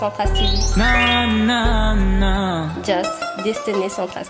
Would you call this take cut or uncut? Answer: uncut